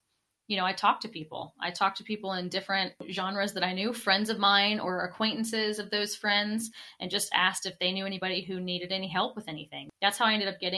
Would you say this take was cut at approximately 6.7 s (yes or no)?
no